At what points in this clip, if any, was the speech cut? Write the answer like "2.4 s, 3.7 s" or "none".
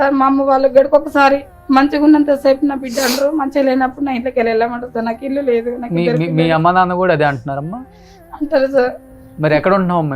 none